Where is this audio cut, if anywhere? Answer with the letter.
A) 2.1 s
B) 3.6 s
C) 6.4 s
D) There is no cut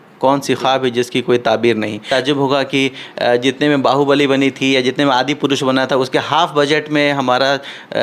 A